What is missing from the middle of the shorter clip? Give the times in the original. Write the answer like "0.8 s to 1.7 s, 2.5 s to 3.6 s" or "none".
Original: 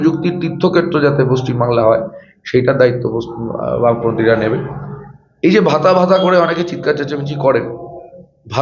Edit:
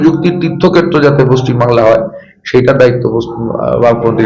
none